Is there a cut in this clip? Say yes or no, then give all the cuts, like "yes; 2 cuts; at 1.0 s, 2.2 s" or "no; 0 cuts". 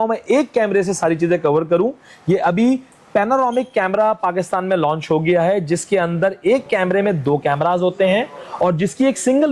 no; 0 cuts